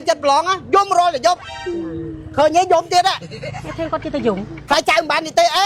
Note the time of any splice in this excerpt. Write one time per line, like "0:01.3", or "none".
none